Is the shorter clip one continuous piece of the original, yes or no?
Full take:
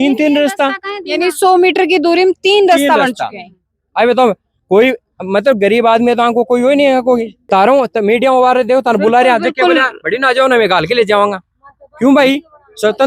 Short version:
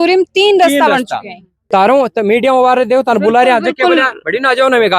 no